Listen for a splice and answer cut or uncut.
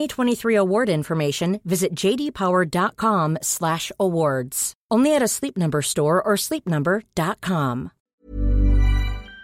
cut